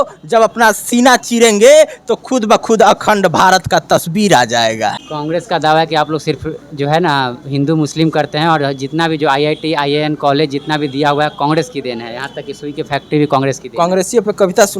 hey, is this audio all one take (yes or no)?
no